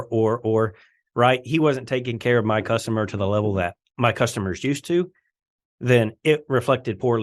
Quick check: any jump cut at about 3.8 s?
yes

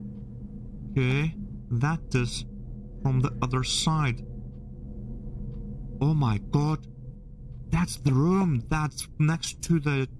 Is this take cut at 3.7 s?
no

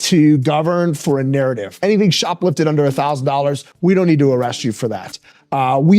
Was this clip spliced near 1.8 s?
yes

